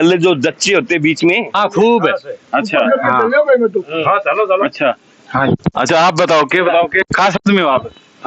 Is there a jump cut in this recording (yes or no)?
yes